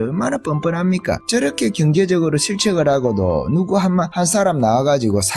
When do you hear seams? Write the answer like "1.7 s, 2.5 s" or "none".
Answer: 1.2 s, 4.1 s